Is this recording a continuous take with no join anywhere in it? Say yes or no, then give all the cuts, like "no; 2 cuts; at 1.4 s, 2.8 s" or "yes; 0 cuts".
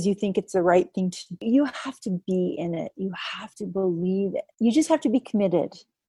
no; 2 cuts; at 1.3 s, 4.5 s